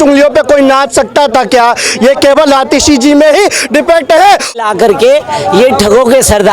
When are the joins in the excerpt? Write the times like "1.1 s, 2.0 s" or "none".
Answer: 4.6 s